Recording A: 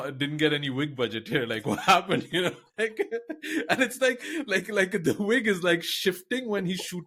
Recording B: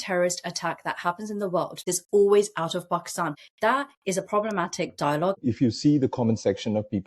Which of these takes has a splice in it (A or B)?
B